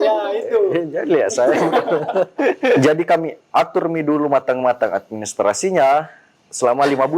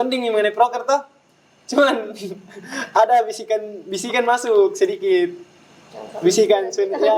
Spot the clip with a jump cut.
first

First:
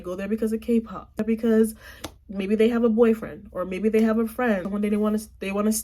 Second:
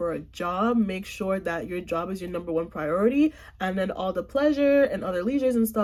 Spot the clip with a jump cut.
first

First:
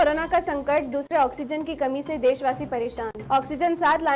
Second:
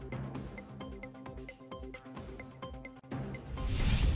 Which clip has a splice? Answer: second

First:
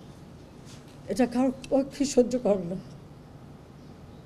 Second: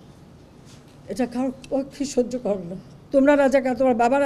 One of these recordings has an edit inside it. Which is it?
second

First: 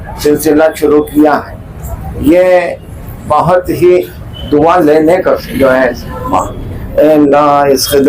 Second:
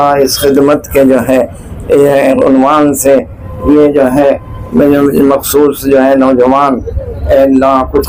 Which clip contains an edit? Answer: first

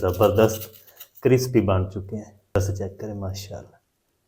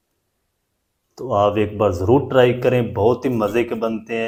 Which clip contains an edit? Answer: first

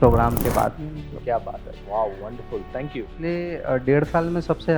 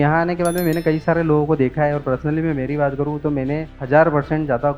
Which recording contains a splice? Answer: first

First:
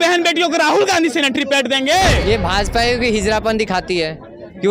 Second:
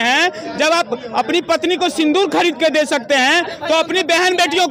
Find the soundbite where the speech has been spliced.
first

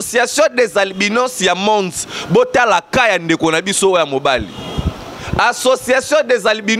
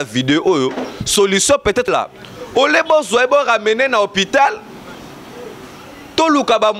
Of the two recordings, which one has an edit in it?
second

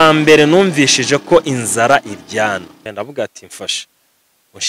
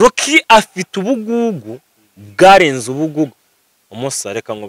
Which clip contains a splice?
first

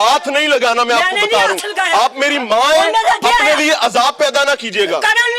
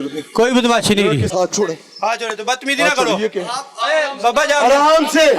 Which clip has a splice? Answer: second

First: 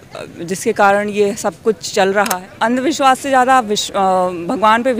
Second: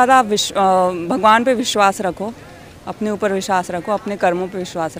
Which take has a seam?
first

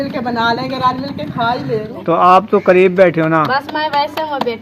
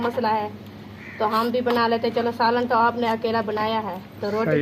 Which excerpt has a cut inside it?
first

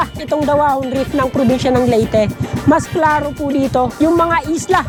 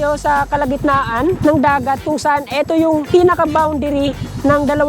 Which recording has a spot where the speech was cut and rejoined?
second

